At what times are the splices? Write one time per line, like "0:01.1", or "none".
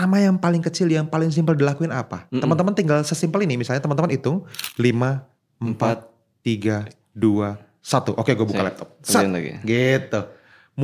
0:04.6